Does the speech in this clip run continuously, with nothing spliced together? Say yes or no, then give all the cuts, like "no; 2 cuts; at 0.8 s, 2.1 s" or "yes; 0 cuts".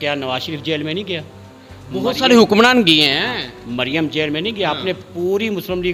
yes; 0 cuts